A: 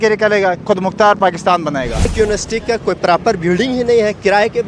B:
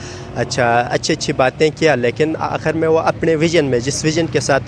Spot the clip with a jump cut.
A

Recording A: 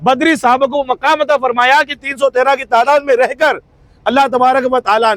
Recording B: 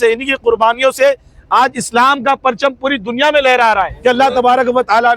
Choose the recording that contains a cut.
B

